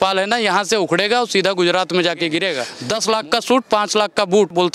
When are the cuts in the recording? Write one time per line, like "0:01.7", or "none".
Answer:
0:02.7